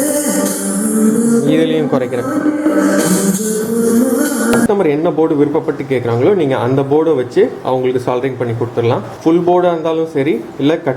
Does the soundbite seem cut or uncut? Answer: cut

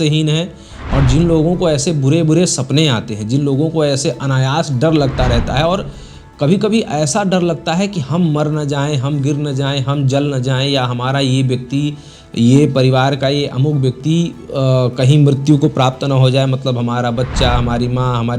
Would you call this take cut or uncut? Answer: uncut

